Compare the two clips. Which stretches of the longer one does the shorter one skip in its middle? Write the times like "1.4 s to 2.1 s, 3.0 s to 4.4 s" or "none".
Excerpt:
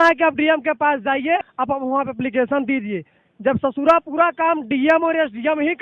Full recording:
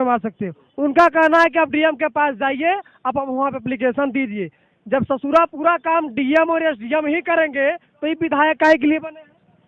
2.7 s to 2.9 s